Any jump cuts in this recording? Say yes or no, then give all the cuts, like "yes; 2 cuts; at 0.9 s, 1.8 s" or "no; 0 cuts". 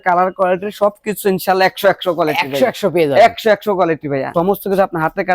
yes; 1 cut; at 4.3 s